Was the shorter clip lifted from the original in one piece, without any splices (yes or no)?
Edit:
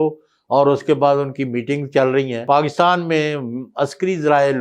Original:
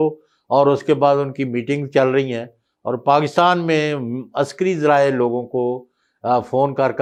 no